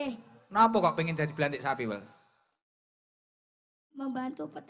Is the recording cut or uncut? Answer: uncut